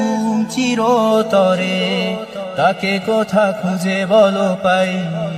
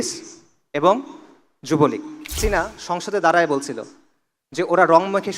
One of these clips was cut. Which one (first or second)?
second